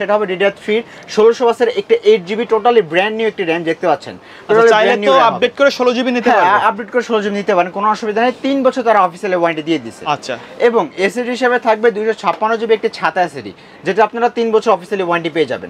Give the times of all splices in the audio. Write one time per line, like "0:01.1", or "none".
none

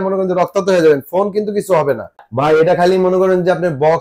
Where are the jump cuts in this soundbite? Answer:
0:02.2

